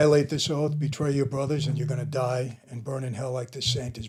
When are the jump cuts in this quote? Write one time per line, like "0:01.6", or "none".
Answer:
none